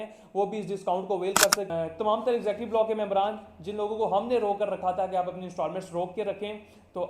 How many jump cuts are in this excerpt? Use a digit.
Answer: 1